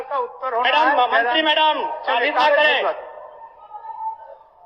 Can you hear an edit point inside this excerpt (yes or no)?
no